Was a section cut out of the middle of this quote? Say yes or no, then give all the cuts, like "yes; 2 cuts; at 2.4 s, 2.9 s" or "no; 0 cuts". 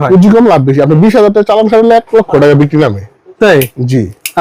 no; 0 cuts